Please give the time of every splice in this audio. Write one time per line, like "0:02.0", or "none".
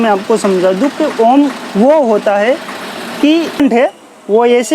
0:03.6